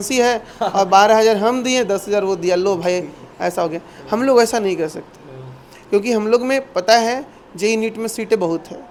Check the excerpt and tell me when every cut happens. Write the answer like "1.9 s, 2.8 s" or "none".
none